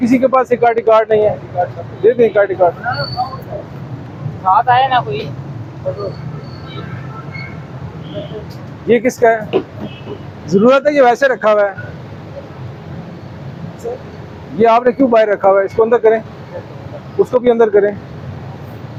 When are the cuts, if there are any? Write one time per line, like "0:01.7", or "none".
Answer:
none